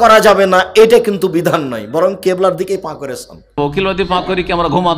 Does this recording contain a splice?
yes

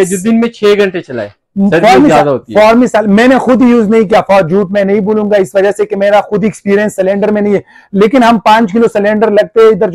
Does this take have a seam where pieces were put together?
no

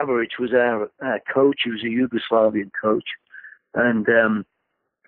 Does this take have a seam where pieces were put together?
no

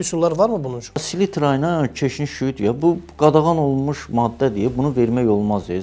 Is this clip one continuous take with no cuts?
no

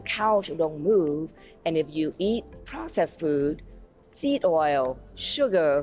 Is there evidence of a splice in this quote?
no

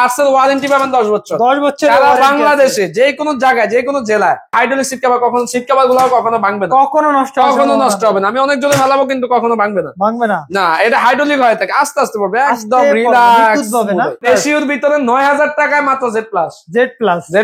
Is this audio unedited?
no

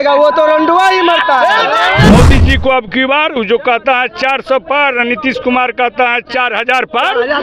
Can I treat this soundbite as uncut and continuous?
no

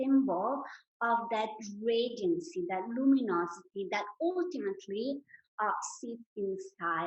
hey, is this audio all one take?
yes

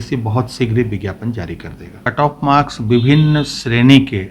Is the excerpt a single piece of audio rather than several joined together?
no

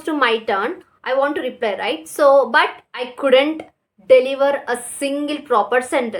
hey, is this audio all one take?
yes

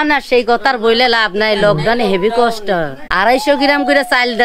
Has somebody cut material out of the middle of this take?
yes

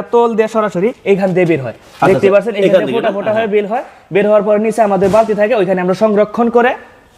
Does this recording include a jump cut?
yes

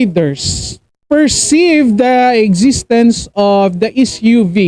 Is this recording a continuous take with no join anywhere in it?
yes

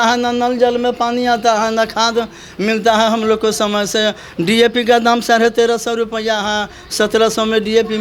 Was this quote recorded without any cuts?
yes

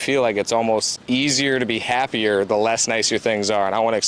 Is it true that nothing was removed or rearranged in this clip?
no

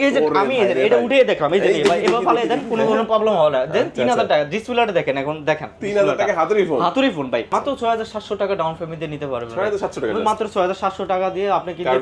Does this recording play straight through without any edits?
no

